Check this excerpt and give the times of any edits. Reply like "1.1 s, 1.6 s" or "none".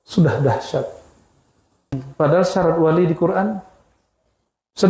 2.1 s